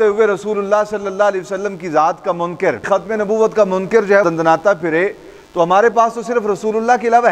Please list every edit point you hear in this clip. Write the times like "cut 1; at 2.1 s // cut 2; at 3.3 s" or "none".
cut 1; at 2.9 s // cut 2; at 4.2 s

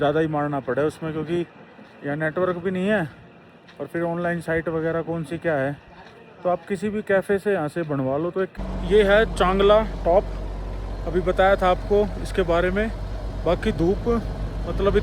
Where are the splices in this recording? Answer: cut 1; at 8.5 s

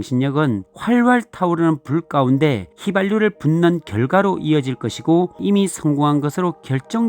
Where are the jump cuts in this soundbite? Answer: cut 1; at 5.4 s

